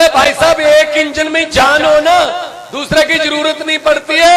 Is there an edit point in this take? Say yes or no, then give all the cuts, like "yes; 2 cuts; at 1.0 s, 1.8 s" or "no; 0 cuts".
no; 0 cuts